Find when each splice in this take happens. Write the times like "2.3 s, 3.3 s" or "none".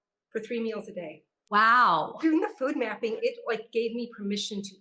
2.1 s, 3.2 s